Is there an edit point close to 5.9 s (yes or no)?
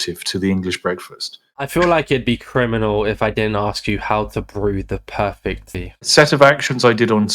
yes